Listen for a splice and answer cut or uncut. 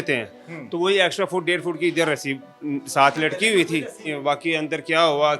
cut